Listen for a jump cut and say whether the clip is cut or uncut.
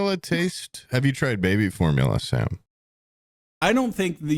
cut